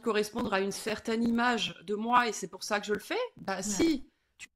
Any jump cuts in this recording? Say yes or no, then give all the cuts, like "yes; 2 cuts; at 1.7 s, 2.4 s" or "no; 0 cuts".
no; 0 cuts